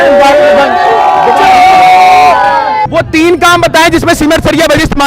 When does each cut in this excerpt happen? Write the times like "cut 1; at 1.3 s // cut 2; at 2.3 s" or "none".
none